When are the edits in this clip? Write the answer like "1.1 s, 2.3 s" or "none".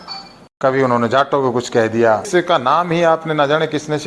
2.3 s